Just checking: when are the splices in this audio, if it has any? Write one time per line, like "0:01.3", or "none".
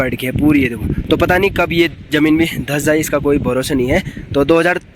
0:01.0